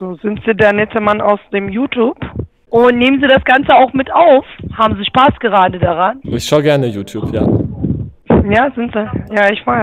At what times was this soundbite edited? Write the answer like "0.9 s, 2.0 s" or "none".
2.5 s, 6.2 s